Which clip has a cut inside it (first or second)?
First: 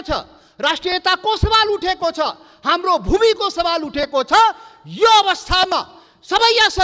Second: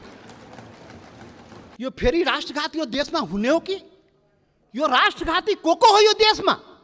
second